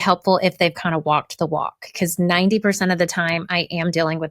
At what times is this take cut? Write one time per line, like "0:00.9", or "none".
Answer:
0:01.9